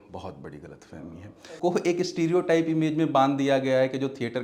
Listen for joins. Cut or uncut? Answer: cut